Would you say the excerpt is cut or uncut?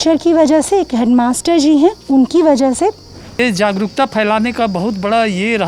cut